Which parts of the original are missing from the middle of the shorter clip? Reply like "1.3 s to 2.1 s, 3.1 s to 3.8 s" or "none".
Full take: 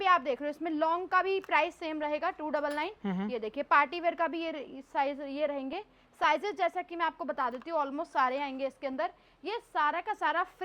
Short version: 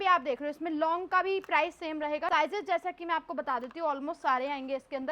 2.3 s to 6.2 s

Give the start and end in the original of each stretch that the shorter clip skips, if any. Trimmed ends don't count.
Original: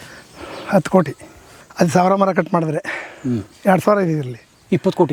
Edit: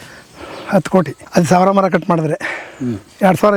1.2 s to 1.6 s

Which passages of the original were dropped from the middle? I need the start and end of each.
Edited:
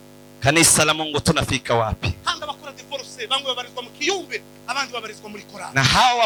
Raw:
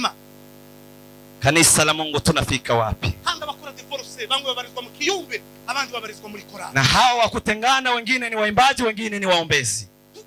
none

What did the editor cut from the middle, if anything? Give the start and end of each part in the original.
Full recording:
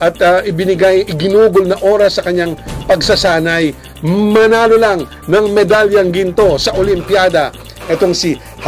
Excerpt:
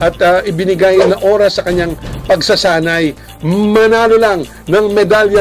1.0 s to 1.6 s

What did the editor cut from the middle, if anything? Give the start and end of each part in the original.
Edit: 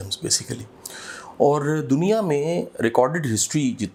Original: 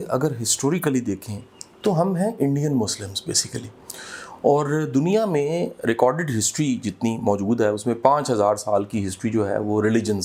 none

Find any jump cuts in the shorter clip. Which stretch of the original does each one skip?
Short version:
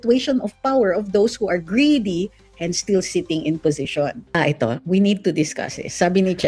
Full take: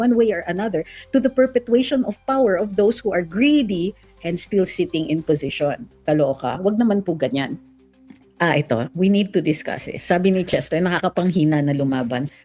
6.0 s to 8.4 s

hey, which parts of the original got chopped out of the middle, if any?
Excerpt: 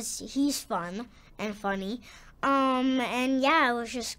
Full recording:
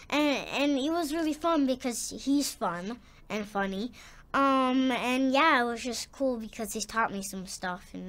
none

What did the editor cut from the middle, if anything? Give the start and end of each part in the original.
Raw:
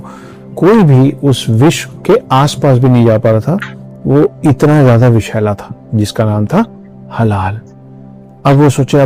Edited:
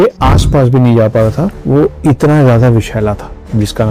3.7 s to 4.0 s

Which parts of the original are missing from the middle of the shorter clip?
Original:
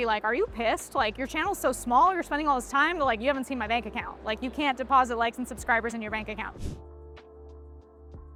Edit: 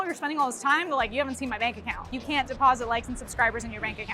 4.2 s to 4.4 s

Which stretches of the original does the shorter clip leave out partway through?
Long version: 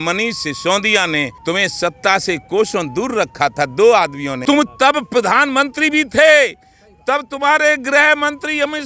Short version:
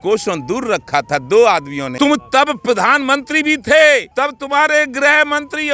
6.6 s to 7.0 s

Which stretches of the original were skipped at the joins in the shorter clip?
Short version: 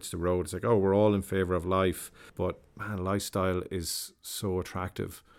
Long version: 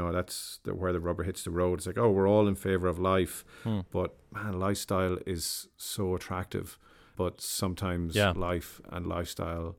3.6 s to 3.8 s

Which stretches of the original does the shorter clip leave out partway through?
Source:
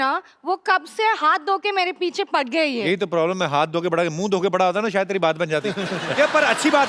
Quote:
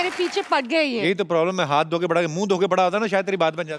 none

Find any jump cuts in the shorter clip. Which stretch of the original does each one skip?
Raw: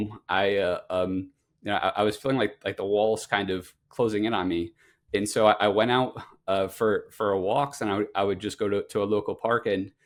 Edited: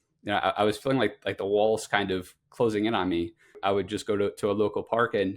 5.0 s to 8.1 s

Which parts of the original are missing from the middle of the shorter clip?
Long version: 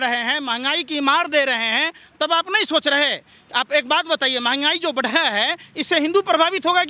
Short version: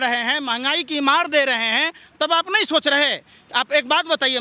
none

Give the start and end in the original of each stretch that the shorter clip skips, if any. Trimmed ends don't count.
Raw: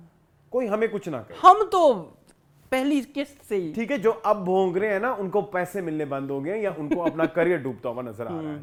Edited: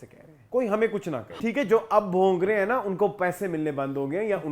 1.4 s to 3.7 s

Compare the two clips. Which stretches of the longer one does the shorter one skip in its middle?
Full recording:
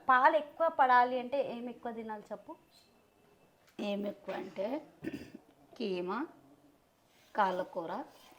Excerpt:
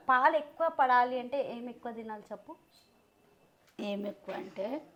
none

